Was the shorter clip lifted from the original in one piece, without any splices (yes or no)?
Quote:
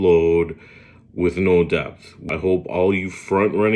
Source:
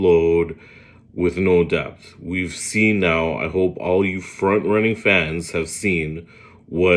no